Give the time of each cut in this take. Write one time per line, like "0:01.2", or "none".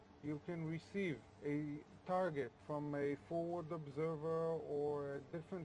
0:03.8